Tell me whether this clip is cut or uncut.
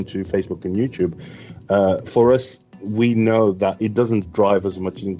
cut